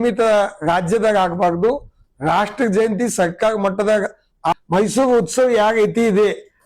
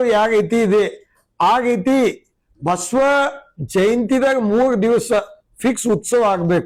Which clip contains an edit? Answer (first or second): first